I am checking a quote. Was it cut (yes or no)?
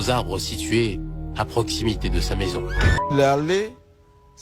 yes